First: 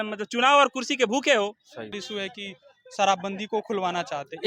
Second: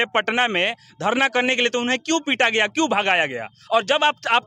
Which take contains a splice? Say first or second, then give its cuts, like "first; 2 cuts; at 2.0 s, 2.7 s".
first; 1 cut; at 1.9 s